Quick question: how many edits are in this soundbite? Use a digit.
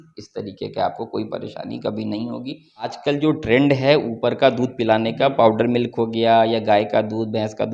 1